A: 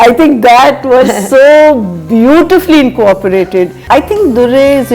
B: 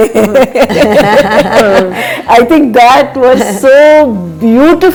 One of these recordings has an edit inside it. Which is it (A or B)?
A